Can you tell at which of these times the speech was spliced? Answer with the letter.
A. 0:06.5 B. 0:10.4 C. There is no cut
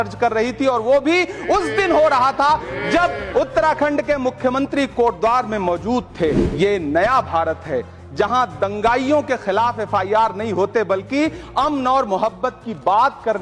A